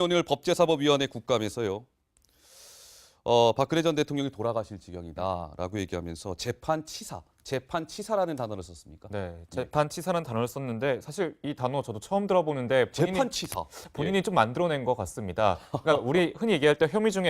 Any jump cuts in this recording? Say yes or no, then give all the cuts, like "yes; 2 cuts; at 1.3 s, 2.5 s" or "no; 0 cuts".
yes; 1 cut; at 10.5 s